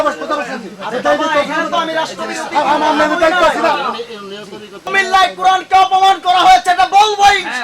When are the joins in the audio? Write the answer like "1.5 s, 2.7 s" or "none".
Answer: 4.9 s